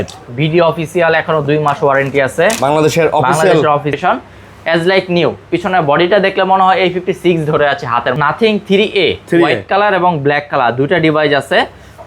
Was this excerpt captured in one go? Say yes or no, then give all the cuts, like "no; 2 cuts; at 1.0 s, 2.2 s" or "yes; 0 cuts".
no; 2 cuts; at 4.0 s, 8.1 s